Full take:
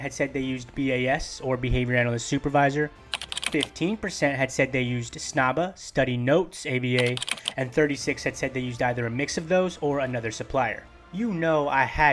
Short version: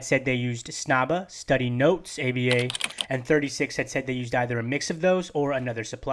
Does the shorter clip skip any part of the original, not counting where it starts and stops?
no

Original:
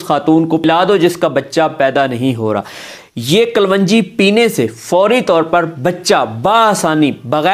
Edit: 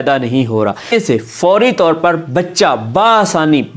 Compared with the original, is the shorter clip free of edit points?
no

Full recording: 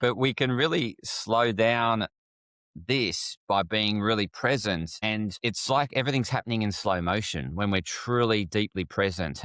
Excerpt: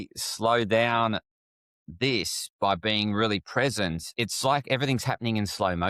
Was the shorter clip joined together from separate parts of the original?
yes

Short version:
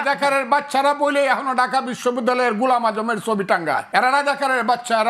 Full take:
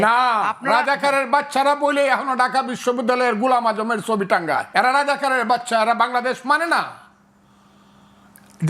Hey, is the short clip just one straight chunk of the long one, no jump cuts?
yes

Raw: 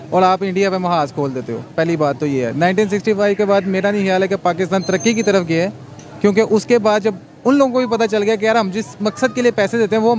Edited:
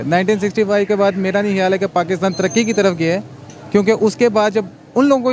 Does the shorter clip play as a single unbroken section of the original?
yes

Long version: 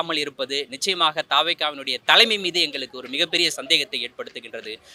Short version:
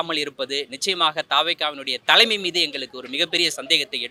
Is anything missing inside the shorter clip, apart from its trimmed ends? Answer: no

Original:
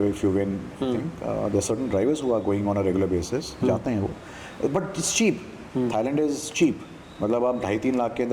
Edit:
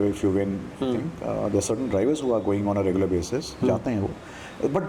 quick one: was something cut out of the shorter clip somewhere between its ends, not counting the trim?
no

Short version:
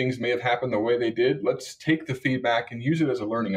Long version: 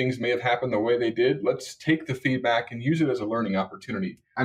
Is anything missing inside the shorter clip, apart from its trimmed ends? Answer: no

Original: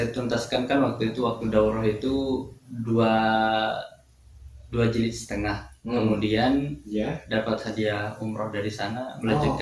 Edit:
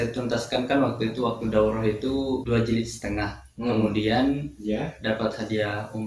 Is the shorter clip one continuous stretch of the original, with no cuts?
no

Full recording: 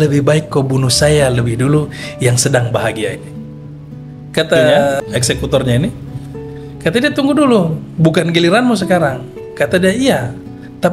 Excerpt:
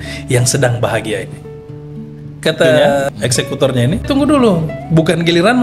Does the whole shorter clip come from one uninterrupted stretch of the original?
no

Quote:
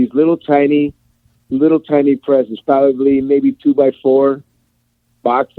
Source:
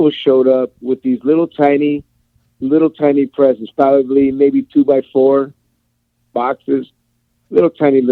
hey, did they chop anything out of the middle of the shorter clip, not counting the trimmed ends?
no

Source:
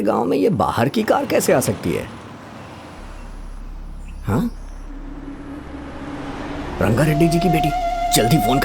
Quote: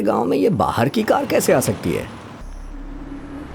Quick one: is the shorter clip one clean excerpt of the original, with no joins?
no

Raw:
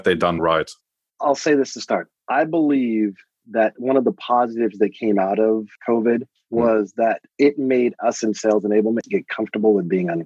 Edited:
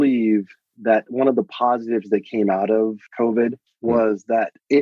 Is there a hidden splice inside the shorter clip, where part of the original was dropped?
no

